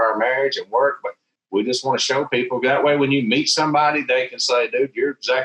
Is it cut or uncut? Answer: uncut